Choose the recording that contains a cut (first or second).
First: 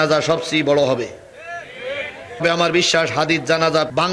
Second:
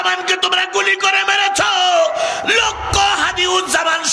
first